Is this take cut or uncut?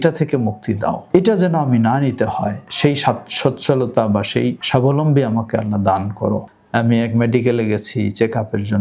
cut